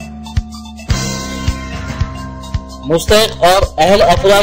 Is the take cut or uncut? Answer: uncut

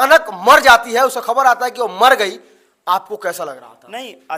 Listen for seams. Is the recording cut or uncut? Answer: uncut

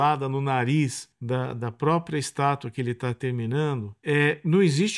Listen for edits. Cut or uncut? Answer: cut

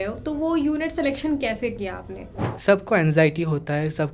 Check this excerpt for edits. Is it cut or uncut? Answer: cut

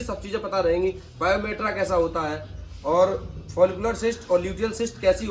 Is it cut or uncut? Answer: uncut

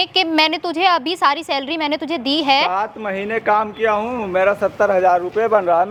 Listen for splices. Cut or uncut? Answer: uncut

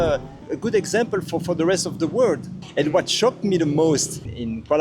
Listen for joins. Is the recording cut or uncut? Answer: cut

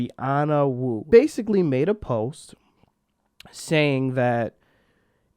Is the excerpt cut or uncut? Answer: cut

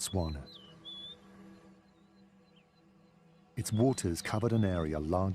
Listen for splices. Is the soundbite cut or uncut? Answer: uncut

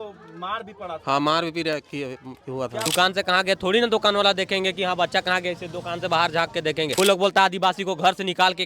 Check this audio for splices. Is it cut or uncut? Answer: cut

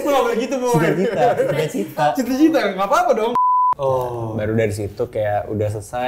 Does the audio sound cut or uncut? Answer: cut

